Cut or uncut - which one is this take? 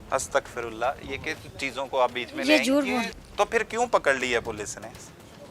cut